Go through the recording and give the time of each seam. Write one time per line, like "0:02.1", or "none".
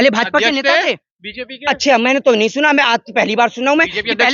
none